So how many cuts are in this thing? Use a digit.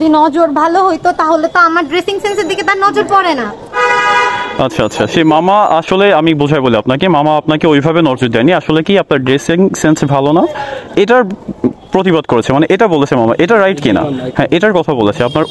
0